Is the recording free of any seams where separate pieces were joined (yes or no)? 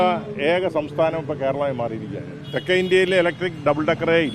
yes